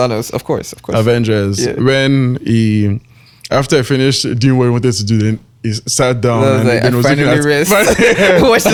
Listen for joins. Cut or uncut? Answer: uncut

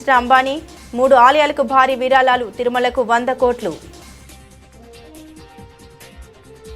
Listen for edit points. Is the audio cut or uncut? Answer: uncut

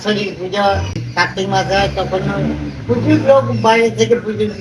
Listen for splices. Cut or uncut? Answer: cut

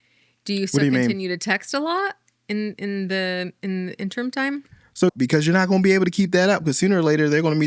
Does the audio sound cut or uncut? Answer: cut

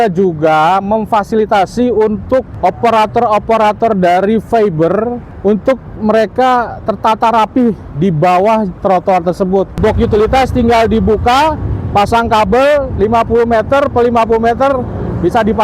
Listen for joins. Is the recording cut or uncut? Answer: cut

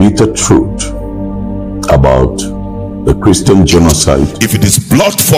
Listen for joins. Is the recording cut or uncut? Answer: cut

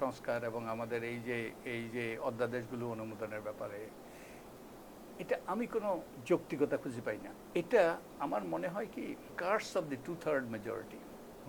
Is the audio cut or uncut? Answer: cut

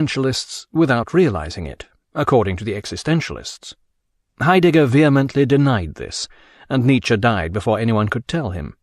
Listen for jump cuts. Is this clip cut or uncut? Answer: cut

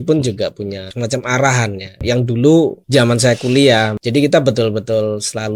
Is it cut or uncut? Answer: cut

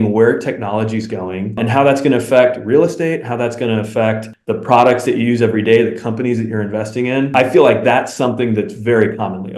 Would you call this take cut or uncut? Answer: cut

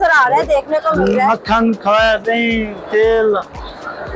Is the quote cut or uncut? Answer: uncut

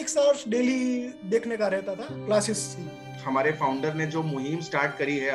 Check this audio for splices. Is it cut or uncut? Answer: cut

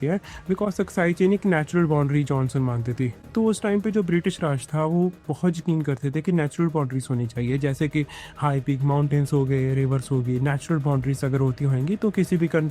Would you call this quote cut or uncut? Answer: uncut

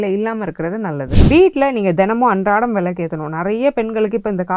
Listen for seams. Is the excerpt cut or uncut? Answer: cut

